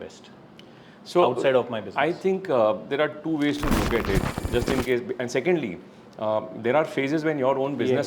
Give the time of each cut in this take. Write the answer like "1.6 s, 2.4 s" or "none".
4.3 s